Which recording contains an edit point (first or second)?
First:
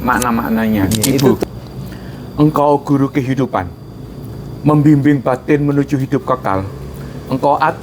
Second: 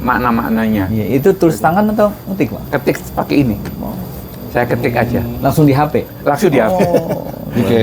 first